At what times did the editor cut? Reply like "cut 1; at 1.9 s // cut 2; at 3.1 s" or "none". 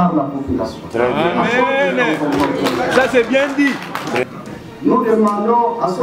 cut 1; at 4.2 s